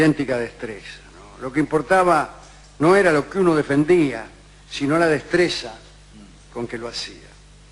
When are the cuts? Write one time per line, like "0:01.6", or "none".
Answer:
0:05.1